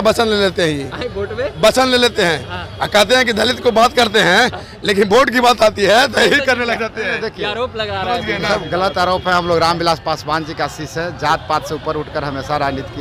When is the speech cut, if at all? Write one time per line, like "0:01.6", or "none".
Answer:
none